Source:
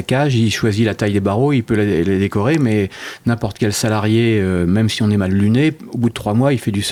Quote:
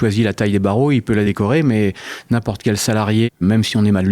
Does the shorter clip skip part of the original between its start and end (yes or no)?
yes